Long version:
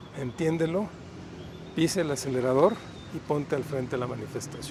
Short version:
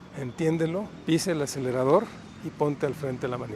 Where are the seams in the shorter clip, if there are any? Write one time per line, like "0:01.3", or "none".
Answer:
0:00.9